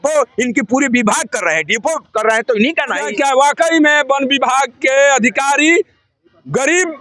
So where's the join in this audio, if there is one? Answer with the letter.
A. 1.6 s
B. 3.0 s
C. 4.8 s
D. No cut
B